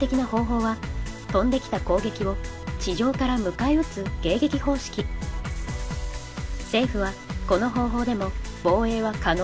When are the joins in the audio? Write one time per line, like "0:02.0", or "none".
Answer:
0:07.3